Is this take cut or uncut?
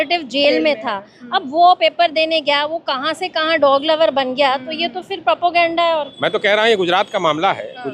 cut